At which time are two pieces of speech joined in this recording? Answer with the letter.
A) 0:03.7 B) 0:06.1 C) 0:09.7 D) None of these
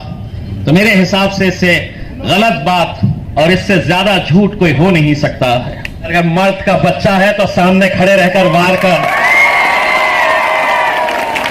B